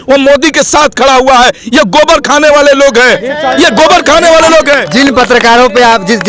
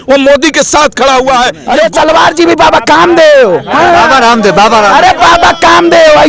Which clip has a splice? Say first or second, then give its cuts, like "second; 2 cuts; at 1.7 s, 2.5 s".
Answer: second; 1 cut; at 1.6 s